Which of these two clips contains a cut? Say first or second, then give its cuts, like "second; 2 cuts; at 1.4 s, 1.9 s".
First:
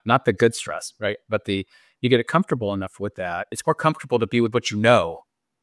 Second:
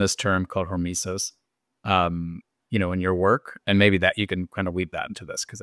first; 1 cut; at 3.6 s